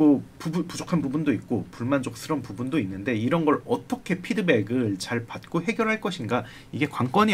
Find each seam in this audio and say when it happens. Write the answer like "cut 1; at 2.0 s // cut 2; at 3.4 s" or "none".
none